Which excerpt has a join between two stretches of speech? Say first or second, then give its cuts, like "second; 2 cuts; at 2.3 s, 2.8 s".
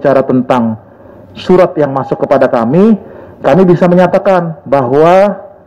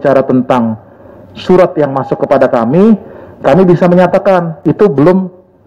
second; 1 cut; at 4.6 s